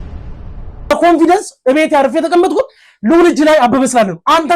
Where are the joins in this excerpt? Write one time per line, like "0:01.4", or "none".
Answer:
0:00.9